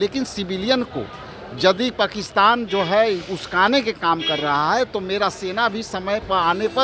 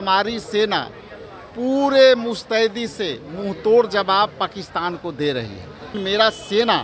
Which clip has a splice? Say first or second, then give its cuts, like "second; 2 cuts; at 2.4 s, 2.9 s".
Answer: second; 1 cut; at 5.9 s